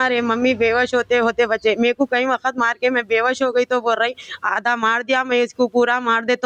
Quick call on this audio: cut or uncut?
uncut